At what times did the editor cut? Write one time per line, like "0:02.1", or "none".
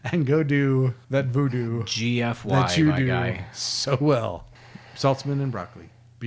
none